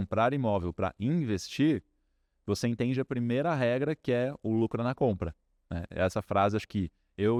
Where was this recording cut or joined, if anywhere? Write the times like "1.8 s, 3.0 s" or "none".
none